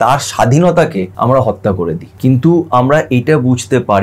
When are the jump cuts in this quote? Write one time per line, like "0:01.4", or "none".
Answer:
0:01.1
0:02.1